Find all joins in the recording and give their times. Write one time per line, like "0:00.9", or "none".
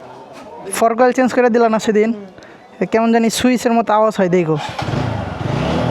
none